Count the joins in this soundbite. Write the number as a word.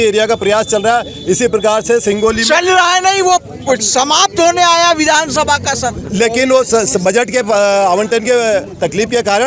zero